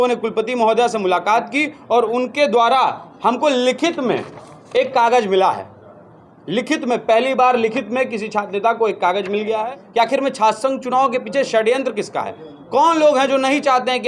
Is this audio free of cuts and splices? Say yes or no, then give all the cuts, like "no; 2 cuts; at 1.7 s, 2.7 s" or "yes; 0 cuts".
no; 1 cut; at 9.6 s